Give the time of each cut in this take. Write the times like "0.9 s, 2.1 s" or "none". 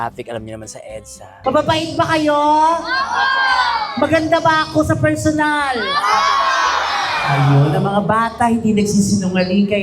1.4 s